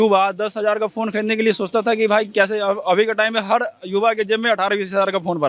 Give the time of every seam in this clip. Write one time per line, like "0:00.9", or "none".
none

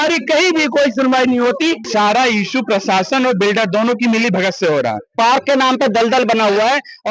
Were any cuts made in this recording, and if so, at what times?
0:01.9
0:05.1

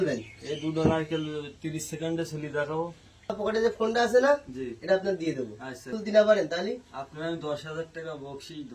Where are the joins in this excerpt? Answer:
0:03.4
0:06.0

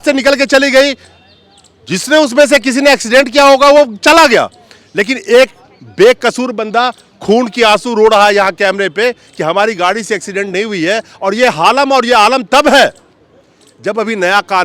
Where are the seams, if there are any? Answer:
none

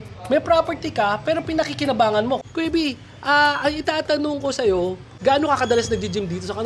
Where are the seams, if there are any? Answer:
0:02.4
0:05.2

